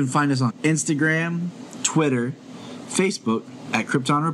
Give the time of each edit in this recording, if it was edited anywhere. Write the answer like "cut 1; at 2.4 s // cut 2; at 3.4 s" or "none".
none